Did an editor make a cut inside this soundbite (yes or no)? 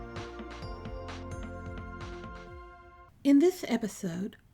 yes